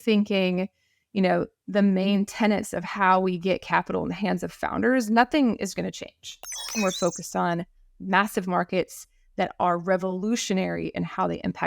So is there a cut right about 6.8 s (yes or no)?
yes